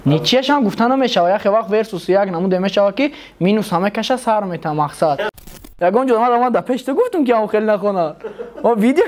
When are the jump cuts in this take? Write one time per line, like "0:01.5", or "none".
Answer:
0:05.5